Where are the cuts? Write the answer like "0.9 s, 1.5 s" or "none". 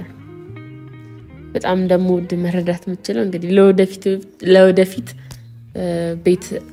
none